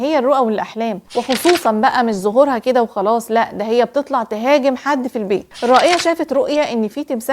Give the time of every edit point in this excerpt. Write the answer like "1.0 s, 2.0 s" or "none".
1.0 s, 5.5 s